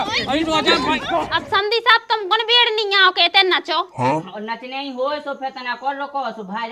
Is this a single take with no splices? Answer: no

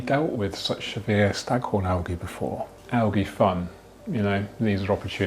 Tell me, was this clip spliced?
yes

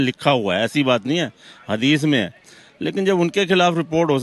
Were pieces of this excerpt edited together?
no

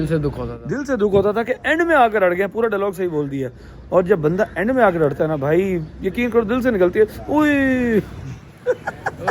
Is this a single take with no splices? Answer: yes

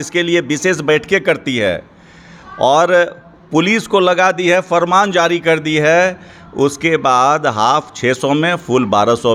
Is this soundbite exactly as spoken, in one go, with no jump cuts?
yes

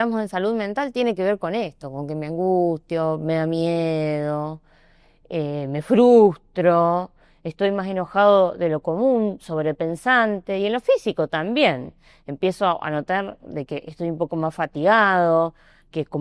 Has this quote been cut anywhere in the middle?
no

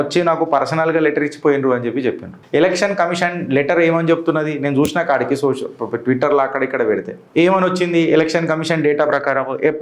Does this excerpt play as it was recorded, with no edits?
no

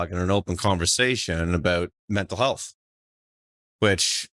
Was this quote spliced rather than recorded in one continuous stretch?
yes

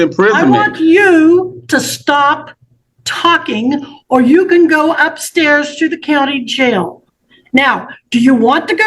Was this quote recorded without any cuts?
yes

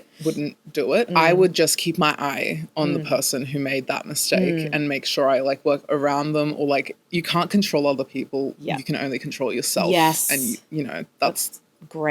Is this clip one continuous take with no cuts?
no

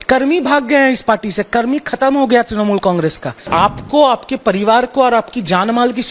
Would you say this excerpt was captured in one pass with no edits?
no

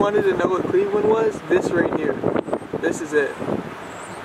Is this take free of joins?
yes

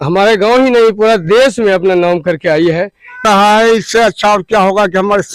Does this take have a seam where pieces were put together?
yes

